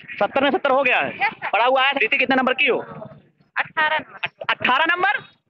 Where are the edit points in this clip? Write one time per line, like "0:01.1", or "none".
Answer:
0:02.0